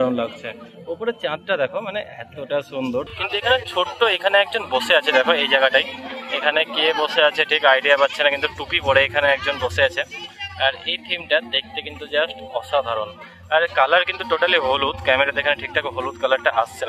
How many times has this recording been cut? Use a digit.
0